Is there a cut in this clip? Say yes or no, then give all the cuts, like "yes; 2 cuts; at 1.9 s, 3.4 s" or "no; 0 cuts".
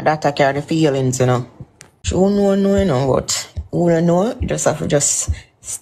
yes; 1 cut; at 2.0 s